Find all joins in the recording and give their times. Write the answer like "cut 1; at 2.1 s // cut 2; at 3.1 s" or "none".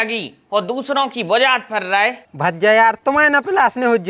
cut 1; at 2.2 s